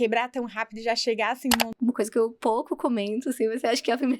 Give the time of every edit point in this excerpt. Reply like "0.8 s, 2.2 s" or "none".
1.7 s

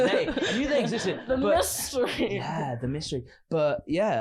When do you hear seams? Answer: none

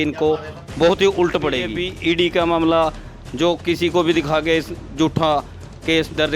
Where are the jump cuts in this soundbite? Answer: 1.8 s

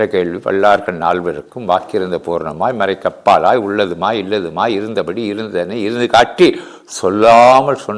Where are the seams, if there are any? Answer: none

